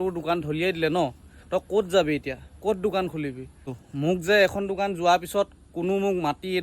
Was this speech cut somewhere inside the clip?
yes; 1 cut; at 3.7 s

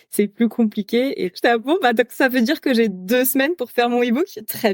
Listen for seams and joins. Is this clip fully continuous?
no; 1 cut; at 1.3 s

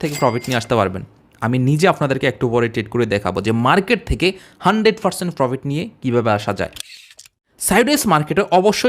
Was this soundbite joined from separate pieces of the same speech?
yes; 1 cut; at 7.1 s

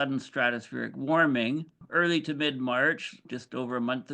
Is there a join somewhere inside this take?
yes; 1 cut; at 1.7 s

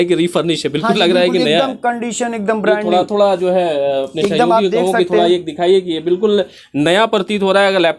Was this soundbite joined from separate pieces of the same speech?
no; 0 cuts

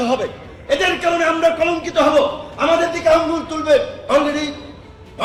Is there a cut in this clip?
no; 0 cuts

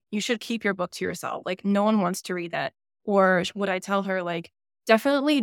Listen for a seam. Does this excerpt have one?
no; 0 cuts

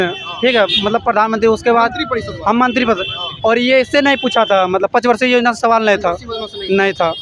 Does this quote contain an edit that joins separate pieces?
no; 0 cuts

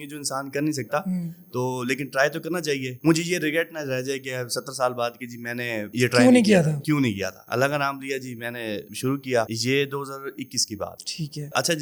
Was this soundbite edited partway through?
no; 0 cuts

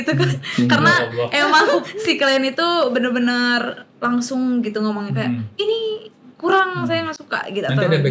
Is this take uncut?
yes; 0 cuts

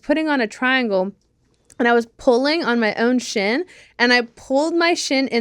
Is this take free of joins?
yes; 0 cuts

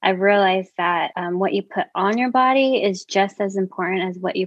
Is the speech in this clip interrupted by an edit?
yes; 1 cut; at 1.1 s

